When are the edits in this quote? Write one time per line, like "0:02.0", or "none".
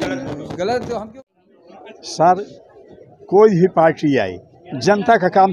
0:01.2